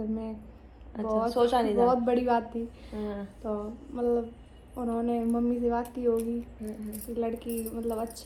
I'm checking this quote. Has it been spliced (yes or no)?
no